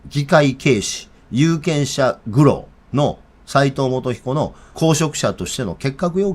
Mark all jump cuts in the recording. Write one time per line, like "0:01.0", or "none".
0:02.7
0:04.6